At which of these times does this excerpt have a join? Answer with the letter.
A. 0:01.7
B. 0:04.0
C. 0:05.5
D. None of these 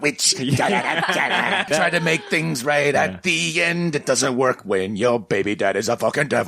A